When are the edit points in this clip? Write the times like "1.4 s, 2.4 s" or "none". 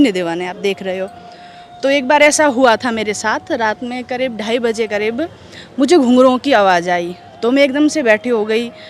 none